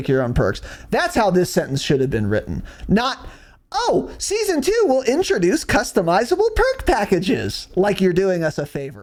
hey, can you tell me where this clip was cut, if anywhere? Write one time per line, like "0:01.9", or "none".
none